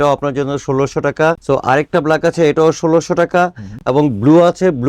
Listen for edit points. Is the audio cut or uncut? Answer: uncut